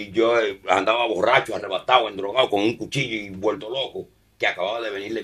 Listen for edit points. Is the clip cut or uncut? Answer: uncut